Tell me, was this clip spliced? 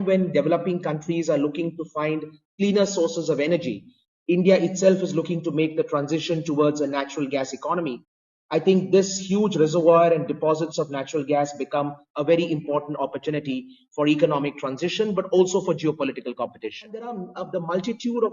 yes; 1 cut; at 17.2 s

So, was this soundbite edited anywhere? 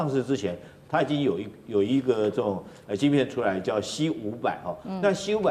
no; 0 cuts

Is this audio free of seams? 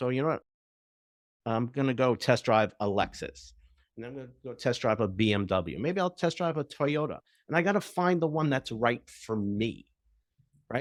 yes; 0 cuts

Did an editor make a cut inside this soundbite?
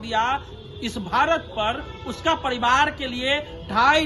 no; 0 cuts

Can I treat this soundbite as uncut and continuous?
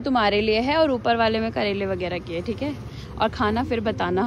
yes; 0 cuts

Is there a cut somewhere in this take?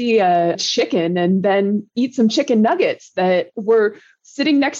yes; 1 cut; at 1.9 s

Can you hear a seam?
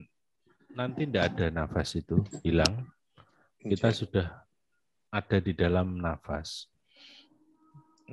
no; 0 cuts

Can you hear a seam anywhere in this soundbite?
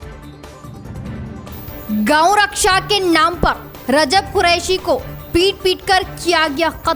yes; 1 cut; at 1.3 s

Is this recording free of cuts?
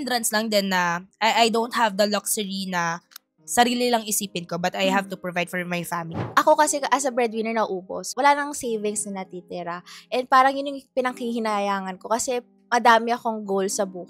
no; 1 cut; at 6.2 s

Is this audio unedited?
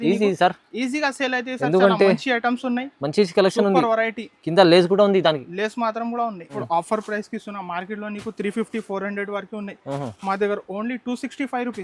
no; 1 cut; at 6.5 s

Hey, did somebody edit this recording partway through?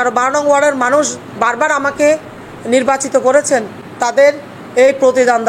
yes; 1 cut; at 3.8 s

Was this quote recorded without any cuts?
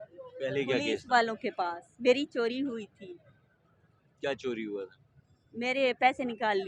yes; 0 cuts

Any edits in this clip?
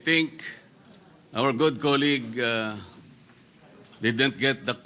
no; 0 cuts

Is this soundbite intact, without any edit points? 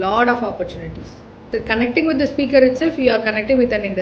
no; 1 cut; at 1.4 s

